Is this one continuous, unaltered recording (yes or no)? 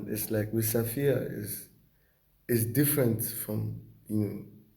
yes